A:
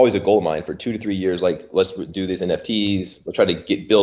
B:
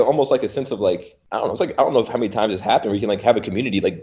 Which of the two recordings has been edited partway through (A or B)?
B